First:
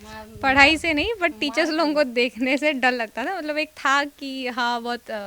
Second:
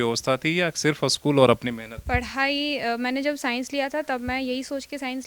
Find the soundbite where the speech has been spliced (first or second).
second